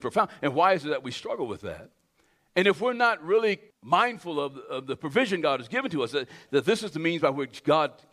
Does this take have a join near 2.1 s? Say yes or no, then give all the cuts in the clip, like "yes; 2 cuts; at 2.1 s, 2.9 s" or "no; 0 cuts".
no; 1 cut; at 3.7 s